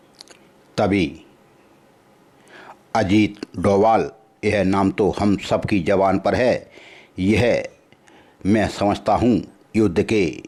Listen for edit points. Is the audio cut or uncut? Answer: uncut